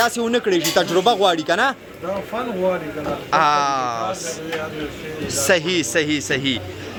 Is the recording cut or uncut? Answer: uncut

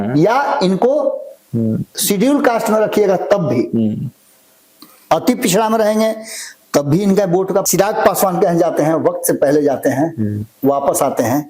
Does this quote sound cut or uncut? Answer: cut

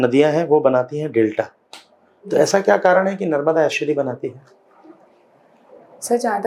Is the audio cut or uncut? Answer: uncut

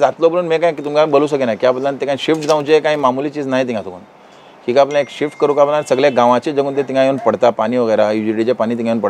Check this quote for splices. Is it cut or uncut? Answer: uncut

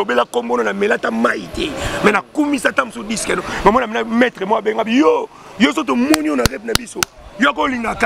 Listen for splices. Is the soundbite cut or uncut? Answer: uncut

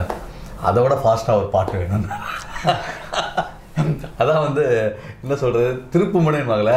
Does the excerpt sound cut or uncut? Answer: uncut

